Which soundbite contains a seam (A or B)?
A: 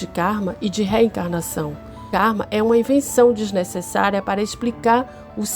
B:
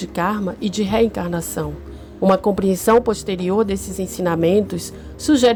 A